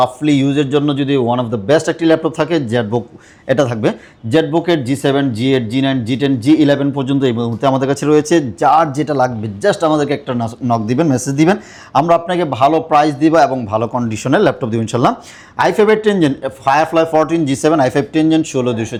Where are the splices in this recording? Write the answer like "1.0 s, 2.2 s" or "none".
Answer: none